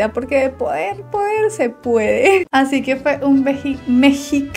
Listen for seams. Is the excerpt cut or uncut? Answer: cut